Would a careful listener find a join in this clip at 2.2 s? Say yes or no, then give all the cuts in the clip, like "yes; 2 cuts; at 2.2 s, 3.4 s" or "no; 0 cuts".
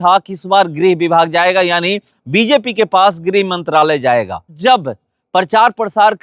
no; 1 cut; at 4.5 s